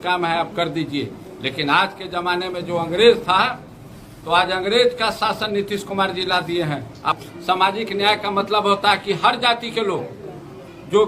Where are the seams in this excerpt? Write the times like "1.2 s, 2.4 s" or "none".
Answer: 7.2 s